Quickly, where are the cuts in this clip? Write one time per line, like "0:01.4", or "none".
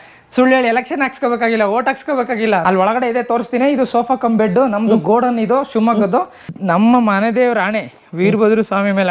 0:02.6
0:06.4

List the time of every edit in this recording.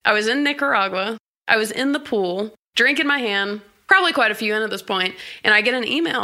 0:01.2
0:02.6
0:03.7

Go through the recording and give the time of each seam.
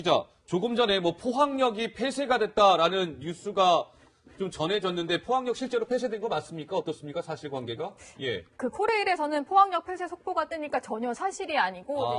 none

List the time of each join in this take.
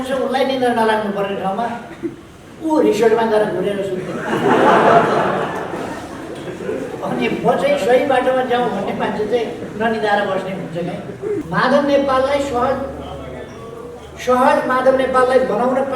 0:11.5

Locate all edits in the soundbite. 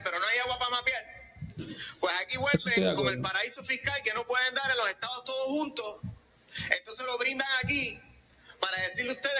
none

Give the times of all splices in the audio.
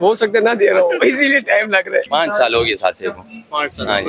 0:02.1

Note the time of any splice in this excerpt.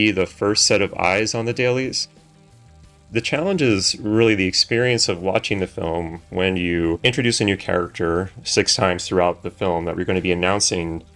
0:02.8

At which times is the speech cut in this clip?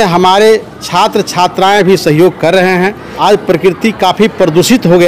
0:03.1

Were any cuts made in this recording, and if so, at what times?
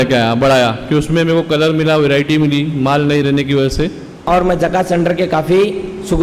0:04.2

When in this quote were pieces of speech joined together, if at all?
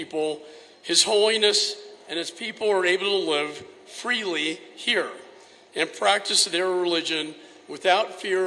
none

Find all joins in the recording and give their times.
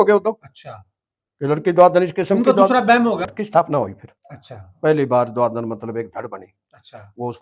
0:03.3

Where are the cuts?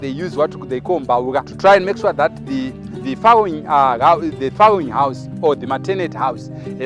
0:01.5

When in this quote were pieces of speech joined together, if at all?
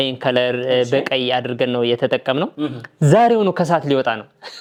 none

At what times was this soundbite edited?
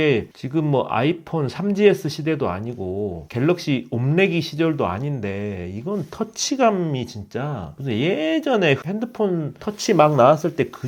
none

